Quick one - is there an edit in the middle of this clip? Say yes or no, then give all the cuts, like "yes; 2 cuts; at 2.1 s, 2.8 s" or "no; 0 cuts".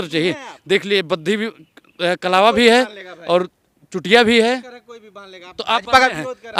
no; 0 cuts